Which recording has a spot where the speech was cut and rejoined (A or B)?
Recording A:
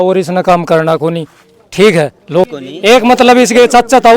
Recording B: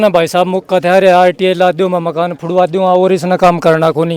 A